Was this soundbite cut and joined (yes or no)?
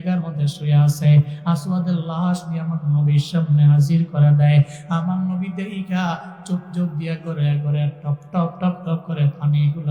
no